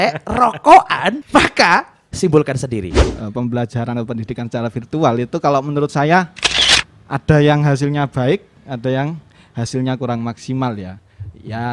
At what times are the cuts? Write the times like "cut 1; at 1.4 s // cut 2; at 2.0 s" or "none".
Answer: cut 1; at 1.2 s // cut 2; at 2.0 s // cut 3; at 3.0 s